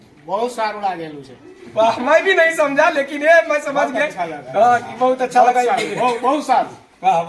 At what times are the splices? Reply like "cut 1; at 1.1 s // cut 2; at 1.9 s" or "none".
none